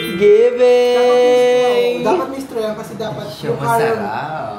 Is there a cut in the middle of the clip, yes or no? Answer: no